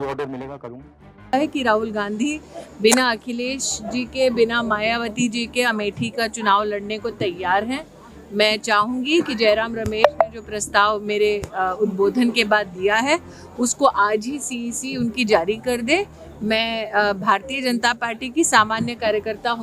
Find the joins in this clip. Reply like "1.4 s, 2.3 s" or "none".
1.3 s